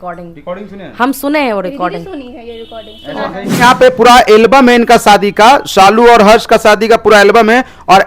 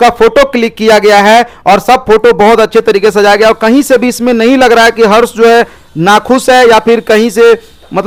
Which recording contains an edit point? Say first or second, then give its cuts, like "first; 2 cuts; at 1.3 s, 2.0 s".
first; 1 cut; at 3.6 s